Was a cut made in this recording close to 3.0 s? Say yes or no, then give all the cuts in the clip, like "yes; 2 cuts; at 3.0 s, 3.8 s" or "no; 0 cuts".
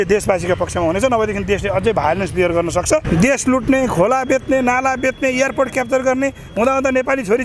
yes; 1 cut; at 3.0 s